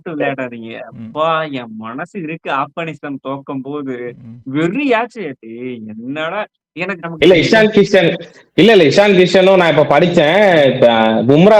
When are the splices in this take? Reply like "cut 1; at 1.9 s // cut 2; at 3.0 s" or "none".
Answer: cut 1; at 7.0 s